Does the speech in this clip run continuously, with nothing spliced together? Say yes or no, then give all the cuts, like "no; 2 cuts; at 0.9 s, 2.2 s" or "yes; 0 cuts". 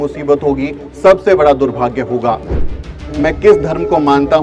no; 1 cut; at 2.9 s